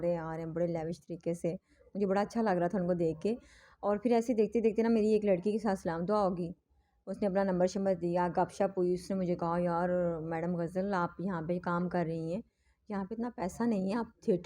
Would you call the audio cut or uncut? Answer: uncut